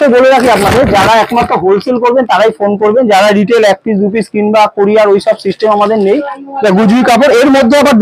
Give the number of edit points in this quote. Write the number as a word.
one